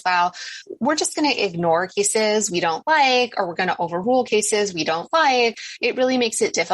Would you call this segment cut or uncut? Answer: cut